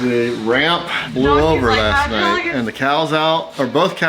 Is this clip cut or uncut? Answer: cut